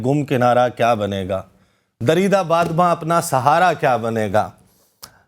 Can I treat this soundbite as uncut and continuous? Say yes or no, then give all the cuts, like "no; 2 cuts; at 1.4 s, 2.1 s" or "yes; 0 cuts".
yes; 0 cuts